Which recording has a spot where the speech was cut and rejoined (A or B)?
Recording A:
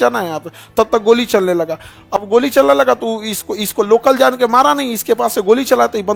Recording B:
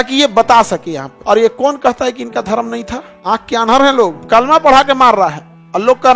B